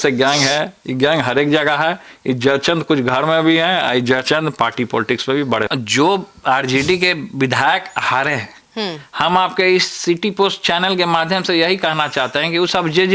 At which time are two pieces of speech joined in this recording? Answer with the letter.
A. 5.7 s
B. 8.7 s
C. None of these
A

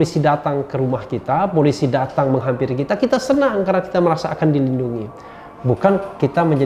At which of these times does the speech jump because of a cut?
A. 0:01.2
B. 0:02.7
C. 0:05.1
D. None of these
D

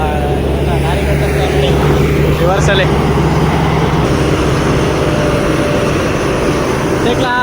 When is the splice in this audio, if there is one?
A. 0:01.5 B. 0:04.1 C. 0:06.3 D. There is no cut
B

